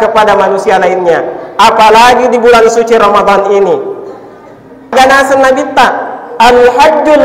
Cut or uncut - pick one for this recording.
cut